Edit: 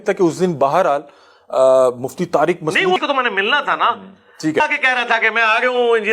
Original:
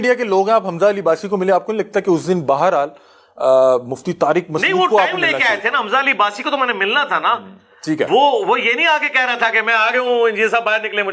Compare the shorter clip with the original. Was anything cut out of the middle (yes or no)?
yes